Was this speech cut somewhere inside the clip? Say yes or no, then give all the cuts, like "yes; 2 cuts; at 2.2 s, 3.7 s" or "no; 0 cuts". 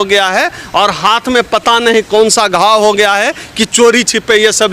no; 0 cuts